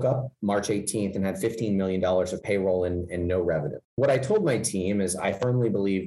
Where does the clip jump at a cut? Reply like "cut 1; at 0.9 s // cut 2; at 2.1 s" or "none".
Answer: cut 1; at 3.9 s